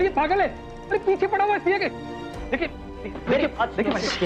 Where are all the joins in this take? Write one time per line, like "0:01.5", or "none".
none